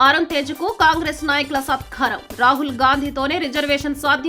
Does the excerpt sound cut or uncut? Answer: uncut